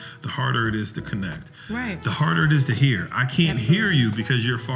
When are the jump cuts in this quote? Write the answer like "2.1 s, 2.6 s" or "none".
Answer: none